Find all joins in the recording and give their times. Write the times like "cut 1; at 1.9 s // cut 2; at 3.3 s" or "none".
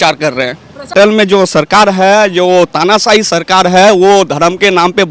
cut 1; at 0.9 s